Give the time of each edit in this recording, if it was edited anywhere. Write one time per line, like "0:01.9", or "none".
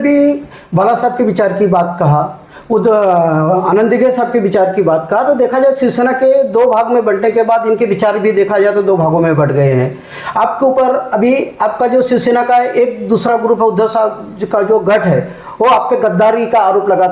none